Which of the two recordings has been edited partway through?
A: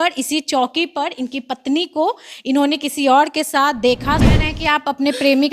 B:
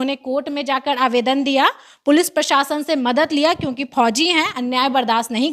A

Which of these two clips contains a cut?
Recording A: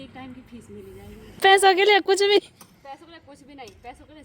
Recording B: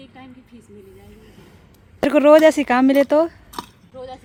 A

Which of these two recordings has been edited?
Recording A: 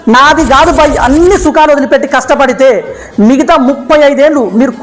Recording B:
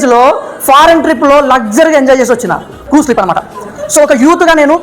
B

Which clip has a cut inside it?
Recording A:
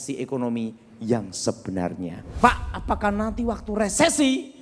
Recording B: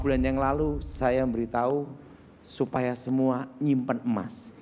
A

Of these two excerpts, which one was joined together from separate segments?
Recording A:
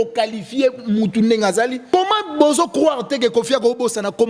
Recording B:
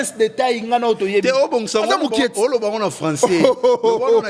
A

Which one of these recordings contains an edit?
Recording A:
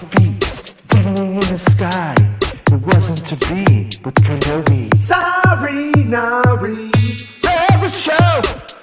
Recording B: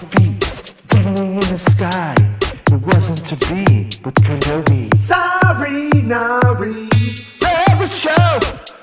A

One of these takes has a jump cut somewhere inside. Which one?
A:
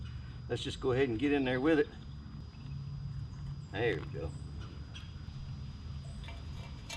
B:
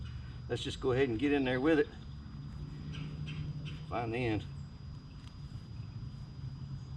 A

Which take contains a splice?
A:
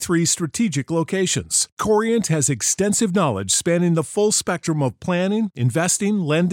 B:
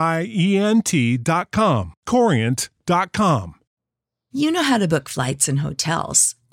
B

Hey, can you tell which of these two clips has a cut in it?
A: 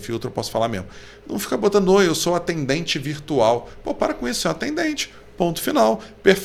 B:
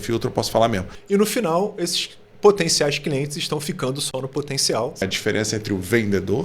B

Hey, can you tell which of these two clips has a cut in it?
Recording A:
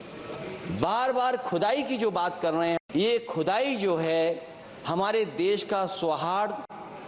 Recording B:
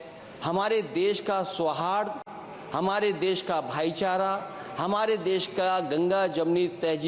A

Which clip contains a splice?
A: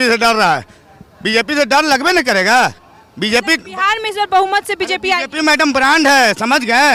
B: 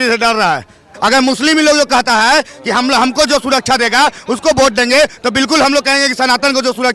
B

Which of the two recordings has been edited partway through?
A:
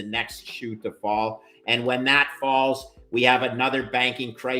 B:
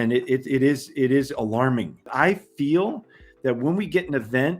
B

